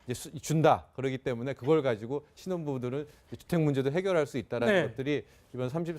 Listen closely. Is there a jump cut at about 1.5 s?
no; 1 cut; at 3.5 s

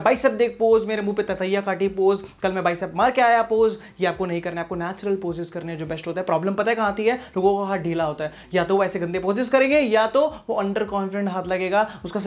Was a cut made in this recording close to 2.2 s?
no; 0 cuts

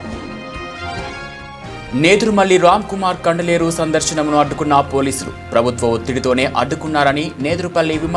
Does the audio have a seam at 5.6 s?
no; 1 cut; at 1.6 s

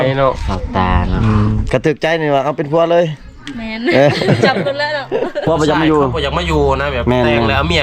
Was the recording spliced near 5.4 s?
yes; 1 cut; at 5.4 s

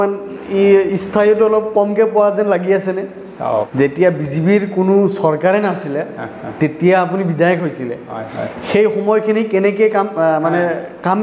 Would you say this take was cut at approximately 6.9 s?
no; 1 cut; at 3.7 s

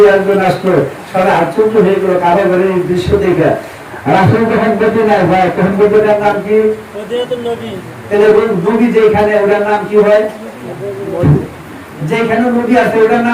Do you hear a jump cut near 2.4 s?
no; 1 cut; at 3.8 s

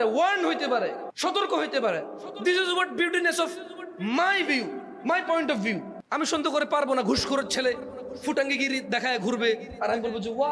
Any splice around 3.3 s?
no; 2 cuts; at 1.1 s, 6.0 s

